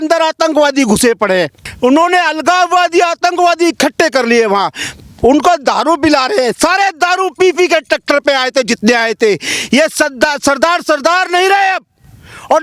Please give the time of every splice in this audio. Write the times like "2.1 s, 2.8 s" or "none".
1.6 s